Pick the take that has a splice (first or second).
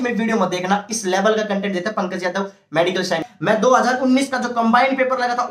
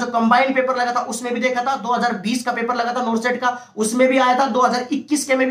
first